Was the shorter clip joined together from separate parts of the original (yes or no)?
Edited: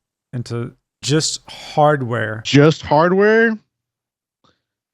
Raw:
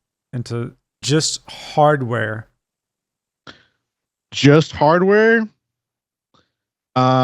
yes